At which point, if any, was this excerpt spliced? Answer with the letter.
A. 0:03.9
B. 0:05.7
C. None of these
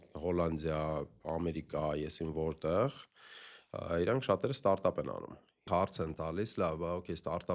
B